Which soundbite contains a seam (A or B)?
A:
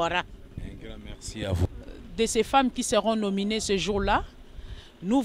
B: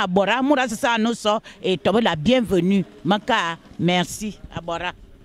A